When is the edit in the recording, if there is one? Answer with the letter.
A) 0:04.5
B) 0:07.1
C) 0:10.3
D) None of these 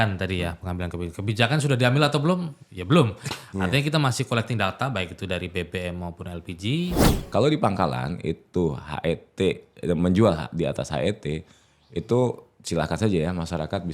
B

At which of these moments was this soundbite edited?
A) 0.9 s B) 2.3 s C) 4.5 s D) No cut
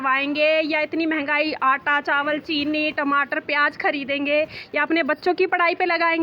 D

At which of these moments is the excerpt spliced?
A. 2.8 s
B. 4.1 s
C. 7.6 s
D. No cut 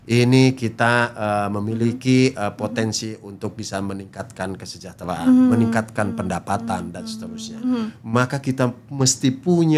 C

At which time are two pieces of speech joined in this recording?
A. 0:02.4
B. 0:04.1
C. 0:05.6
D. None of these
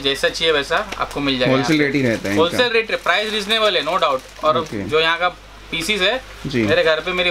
D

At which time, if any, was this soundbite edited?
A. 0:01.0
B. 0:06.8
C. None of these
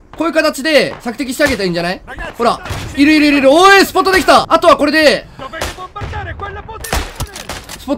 C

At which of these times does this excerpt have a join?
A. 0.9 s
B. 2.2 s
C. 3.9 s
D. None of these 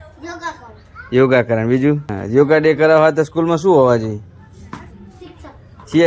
B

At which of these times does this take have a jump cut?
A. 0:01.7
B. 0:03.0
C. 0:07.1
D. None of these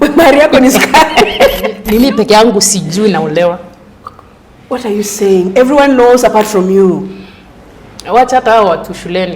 A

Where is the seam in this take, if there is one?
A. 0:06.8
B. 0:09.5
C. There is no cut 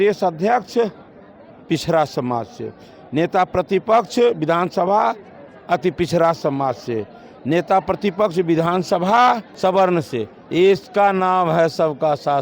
B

